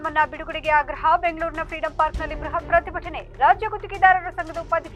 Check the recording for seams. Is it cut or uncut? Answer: uncut